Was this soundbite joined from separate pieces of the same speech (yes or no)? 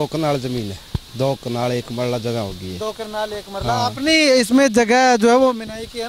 no